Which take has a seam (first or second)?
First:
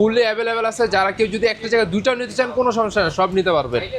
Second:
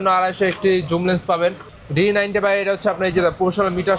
second